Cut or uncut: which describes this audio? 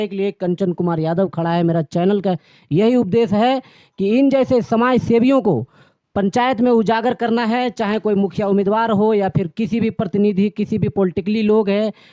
uncut